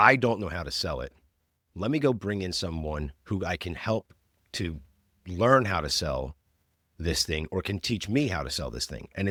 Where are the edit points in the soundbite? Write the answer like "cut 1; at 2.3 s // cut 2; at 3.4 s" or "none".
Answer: none